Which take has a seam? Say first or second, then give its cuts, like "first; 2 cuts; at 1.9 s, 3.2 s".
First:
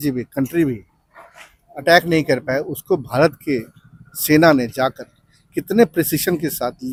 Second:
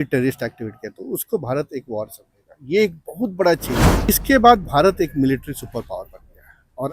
second; 1 cut; at 4.1 s